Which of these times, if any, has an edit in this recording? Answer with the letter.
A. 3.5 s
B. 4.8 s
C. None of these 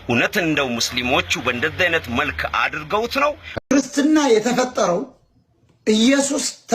A